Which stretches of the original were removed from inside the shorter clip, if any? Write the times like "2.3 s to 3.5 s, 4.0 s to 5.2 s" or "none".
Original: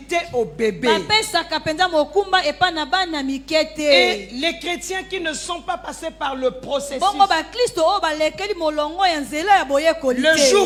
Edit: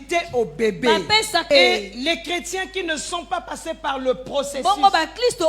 1.4 s to 3.8 s